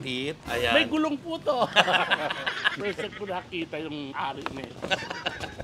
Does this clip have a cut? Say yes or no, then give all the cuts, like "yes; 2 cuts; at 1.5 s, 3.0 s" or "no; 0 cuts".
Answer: yes; 1 cut; at 2.8 s